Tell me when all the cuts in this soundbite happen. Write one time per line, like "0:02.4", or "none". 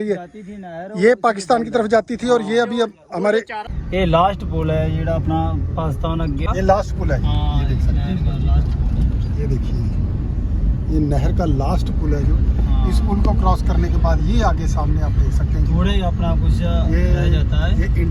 0:03.8
0:06.5